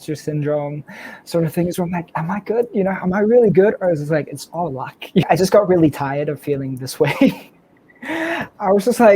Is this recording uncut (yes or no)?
no